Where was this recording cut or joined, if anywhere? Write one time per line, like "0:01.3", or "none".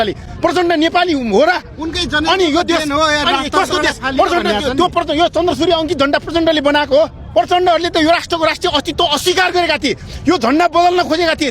0:07.2